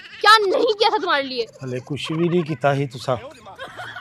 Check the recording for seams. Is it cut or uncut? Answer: uncut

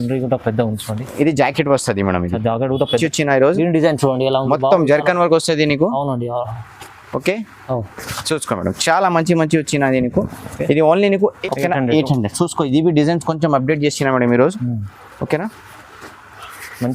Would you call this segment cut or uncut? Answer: cut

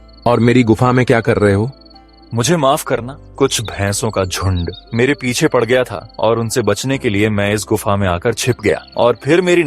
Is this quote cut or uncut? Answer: cut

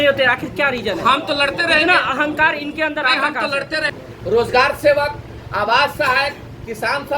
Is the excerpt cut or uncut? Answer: cut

